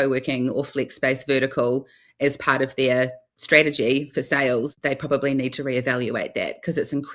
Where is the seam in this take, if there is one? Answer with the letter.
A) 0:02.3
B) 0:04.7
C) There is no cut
B